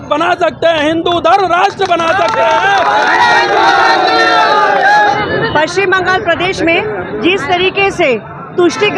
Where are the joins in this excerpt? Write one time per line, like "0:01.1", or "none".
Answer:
none